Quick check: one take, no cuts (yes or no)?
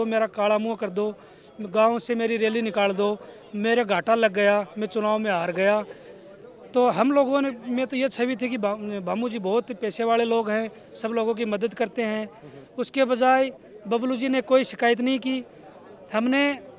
yes